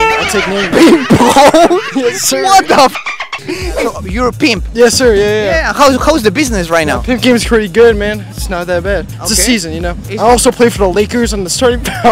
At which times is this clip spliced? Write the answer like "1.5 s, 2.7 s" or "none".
none